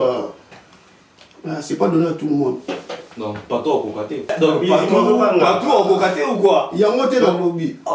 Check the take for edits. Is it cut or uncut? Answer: cut